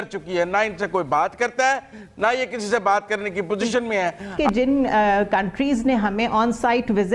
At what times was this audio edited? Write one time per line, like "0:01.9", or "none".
0:04.3